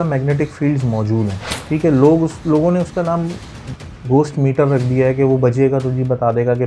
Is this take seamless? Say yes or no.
no